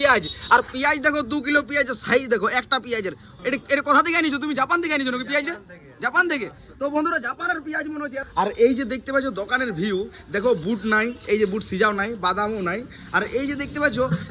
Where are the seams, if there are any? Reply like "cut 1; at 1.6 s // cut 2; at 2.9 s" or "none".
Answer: cut 1; at 3.3 s // cut 2; at 8.2 s